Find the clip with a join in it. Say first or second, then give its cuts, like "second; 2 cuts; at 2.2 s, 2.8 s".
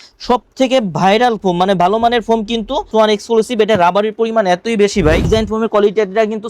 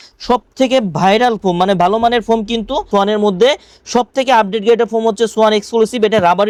first; 2 cuts; at 2.9 s, 5.3 s